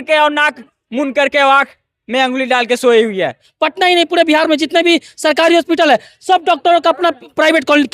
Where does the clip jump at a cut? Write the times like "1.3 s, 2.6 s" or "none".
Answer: 3.5 s